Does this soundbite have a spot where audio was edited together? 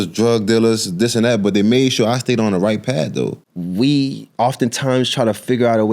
yes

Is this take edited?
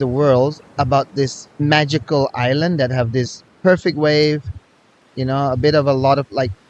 yes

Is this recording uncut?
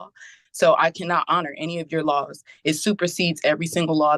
yes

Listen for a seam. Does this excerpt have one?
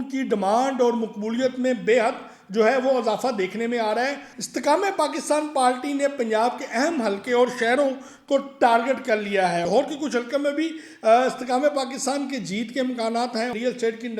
yes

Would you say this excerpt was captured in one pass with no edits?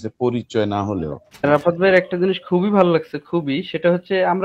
no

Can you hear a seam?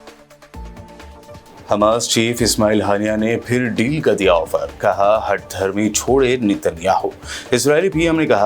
yes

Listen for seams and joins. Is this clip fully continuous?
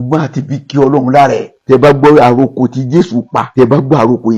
no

